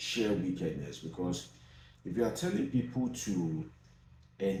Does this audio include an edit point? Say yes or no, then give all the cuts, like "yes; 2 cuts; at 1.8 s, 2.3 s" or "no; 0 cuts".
no; 0 cuts